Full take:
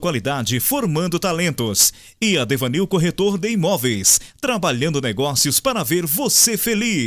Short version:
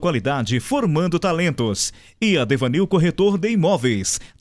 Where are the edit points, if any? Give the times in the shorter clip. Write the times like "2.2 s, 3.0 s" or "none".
none